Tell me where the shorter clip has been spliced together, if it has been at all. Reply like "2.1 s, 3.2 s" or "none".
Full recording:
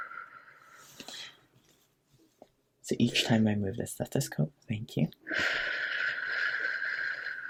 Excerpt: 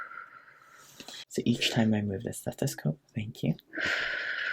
1.2 s